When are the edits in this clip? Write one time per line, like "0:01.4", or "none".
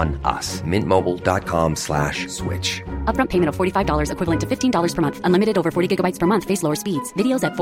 none